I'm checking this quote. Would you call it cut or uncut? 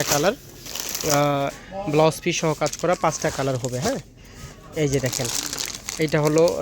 cut